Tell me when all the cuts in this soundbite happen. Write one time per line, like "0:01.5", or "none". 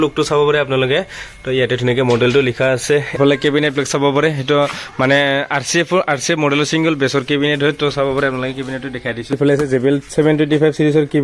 0:03.2
0:09.4